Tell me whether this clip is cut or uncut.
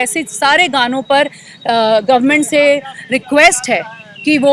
uncut